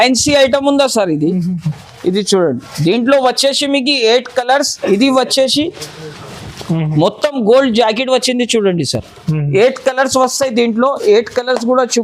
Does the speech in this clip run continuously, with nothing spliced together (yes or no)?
yes